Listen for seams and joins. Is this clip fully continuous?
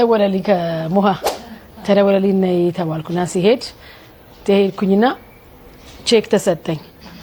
yes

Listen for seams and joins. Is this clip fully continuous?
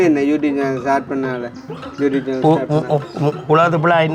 yes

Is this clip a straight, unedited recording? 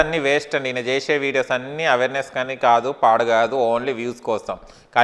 yes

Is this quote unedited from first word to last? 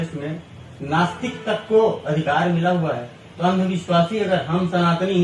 yes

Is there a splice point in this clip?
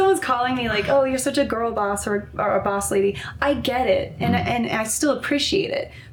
no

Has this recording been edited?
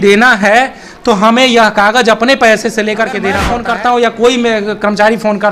yes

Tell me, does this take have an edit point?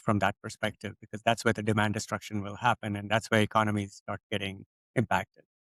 no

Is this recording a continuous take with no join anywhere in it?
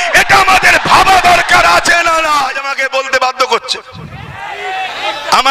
no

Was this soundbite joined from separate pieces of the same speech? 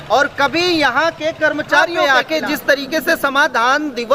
yes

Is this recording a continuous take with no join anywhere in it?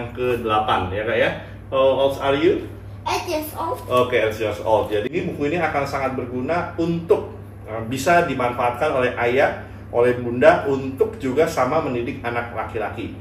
no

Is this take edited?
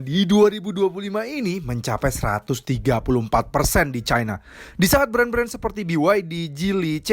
no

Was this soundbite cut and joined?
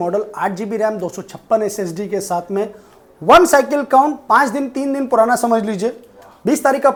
no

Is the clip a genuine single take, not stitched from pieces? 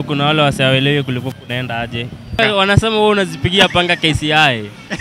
no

